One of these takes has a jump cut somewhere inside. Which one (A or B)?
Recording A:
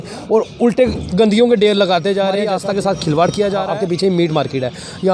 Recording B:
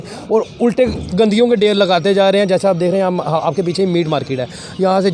A